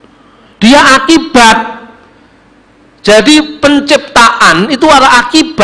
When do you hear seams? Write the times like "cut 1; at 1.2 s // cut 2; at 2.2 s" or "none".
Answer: none